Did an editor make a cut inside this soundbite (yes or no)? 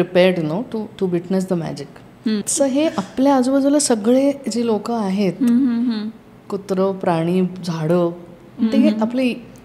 yes